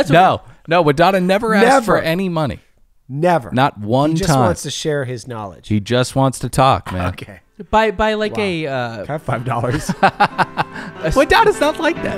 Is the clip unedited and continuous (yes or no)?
no